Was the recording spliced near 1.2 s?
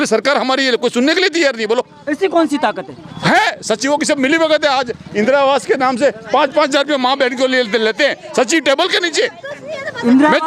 no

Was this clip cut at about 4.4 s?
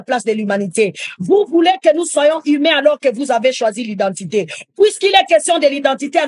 no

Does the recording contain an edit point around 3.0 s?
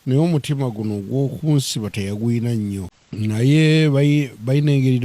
yes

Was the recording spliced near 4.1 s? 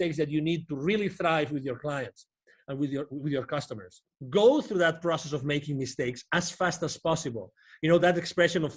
yes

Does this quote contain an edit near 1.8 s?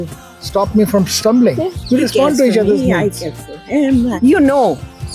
yes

